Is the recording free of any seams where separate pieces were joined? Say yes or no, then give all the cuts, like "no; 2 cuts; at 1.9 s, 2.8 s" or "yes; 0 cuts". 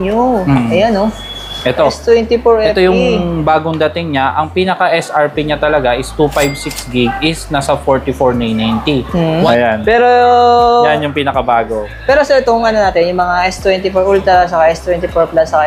yes; 0 cuts